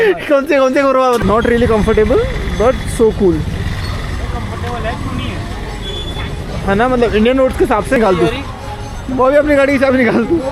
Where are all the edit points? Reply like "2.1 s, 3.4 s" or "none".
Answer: 1.2 s, 8.0 s